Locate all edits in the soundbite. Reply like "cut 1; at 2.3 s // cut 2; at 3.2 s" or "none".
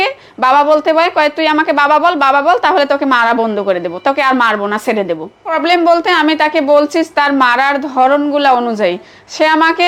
cut 1; at 5.6 s